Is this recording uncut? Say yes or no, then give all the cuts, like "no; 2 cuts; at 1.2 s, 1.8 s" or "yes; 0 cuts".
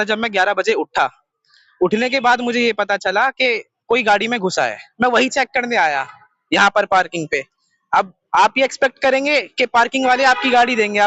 yes; 0 cuts